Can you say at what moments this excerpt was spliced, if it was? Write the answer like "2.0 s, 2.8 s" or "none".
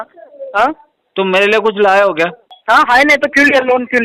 2.5 s